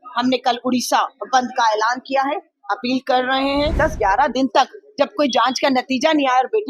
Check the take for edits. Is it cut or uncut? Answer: cut